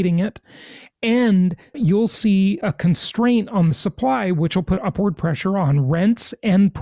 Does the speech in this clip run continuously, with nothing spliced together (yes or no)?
no